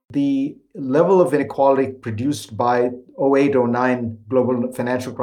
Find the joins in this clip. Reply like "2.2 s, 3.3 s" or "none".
1.4 s